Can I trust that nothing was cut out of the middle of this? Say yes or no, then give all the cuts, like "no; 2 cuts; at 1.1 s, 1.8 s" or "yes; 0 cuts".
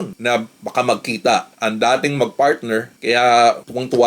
no; 1 cut; at 2.9 s